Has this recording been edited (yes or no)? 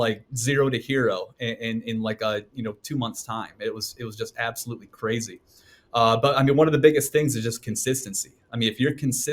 no